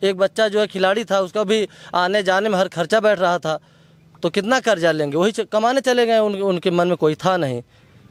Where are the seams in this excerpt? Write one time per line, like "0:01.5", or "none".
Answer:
none